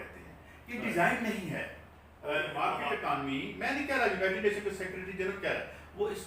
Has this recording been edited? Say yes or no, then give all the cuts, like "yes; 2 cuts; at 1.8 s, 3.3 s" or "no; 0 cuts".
yes; 1 cut; at 2.7 s